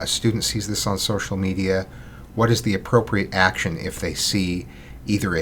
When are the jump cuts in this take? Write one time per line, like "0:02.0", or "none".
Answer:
none